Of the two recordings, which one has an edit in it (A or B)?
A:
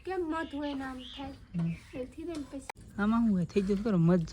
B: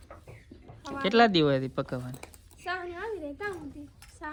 A